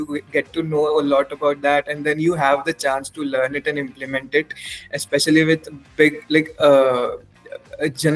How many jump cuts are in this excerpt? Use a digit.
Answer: 0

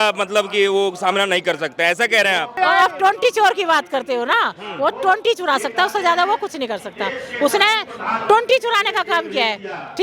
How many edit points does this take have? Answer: 1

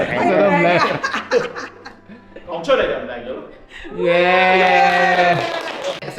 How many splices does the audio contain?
0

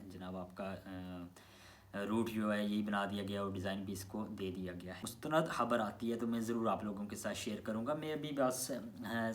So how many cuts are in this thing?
1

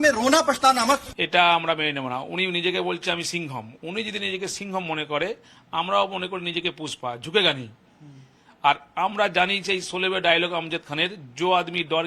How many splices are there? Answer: 2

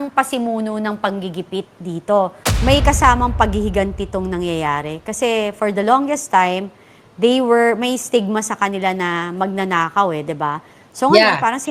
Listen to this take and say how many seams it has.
1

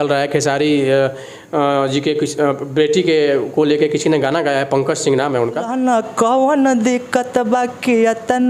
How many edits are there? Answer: 1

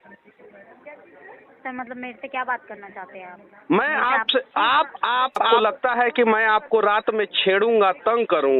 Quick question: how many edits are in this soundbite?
1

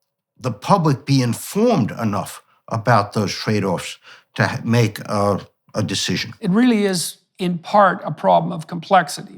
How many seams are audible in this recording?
1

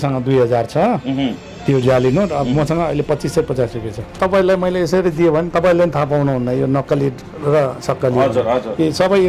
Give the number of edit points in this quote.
1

